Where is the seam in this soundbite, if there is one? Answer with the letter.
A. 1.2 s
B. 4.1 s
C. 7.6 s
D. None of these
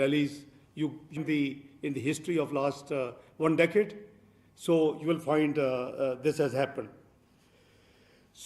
A